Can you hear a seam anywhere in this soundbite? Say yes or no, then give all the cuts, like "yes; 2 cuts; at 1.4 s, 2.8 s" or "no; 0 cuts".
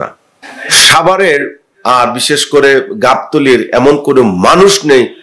no; 0 cuts